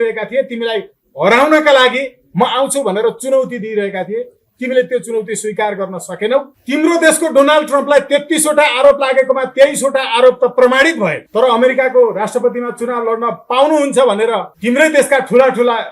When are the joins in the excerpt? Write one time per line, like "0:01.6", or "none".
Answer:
0:06.6